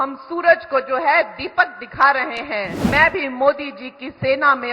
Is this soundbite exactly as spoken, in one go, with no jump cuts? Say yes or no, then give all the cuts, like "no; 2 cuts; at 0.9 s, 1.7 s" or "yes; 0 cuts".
no; 1 cut; at 2.9 s